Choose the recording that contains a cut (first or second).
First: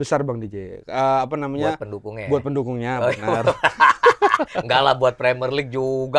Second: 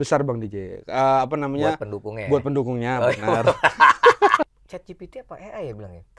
second